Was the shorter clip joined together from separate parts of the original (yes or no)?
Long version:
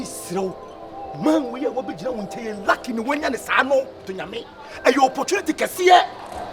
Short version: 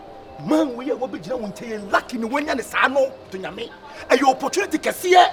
no